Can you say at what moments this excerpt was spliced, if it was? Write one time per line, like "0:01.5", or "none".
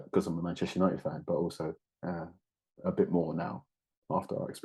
none